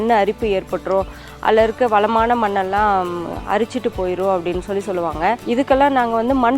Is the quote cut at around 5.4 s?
yes; 1 cut; at 5.4 s

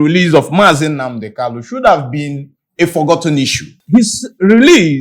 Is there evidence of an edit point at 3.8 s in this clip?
yes; 1 cut; at 3.8 s

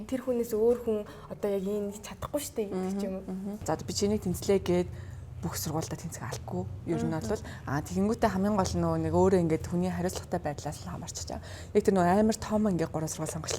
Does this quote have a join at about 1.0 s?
no; 1 cut; at 3.6 s

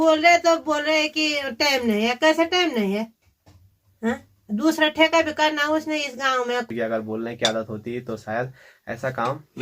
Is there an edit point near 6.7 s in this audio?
yes; 1 cut; at 6.7 s

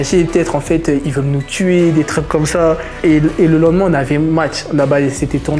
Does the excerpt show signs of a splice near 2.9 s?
no; 0 cuts

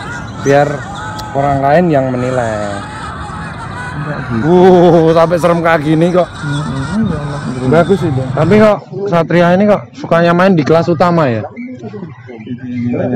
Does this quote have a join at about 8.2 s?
yes; 1 cut; at 8.2 s

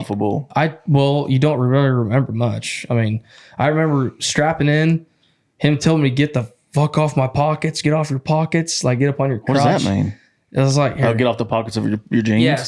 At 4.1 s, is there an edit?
no; 0 cuts

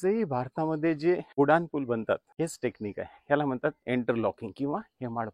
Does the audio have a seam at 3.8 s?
no; 2 cuts; at 1.3 s, 2.3 s

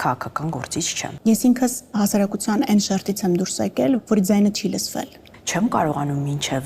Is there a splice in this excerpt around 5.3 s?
yes; 2 cuts; at 1.1 s, 5.3 s

